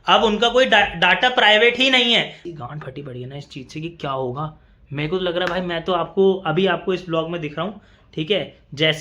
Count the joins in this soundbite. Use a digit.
1